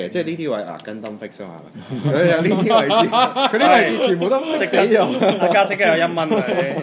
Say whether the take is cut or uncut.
uncut